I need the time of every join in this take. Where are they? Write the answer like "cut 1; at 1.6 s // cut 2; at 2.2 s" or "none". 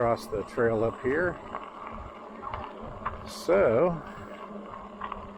none